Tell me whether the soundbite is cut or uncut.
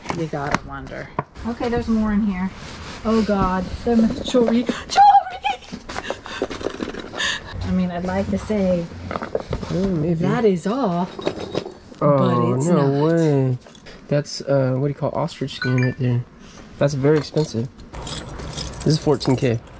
cut